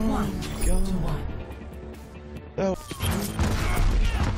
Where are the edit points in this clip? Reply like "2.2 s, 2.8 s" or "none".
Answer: 2.8 s